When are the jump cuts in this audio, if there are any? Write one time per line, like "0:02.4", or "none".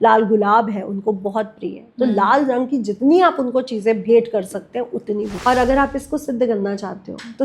0:05.3